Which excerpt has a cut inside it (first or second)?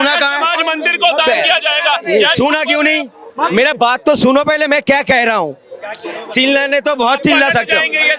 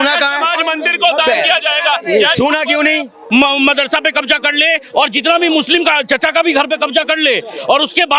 second